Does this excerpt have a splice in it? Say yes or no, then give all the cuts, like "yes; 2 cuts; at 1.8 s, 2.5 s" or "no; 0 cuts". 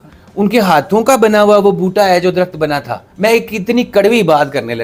yes; 1 cut; at 3.0 s